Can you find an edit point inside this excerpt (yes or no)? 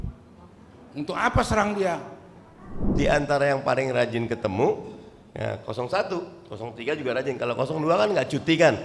yes